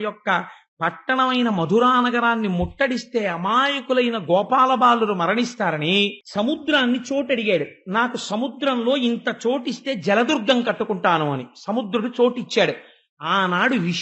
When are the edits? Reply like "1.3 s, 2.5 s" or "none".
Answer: 6.2 s